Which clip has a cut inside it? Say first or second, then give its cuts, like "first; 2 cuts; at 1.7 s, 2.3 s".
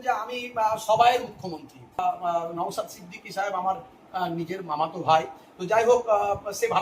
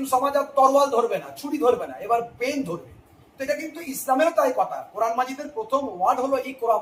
first; 1 cut; at 2.0 s